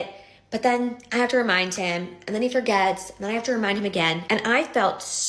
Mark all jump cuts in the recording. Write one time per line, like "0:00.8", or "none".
0:04.2